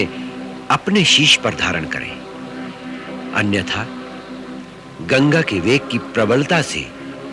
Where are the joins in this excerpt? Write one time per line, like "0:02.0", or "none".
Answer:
none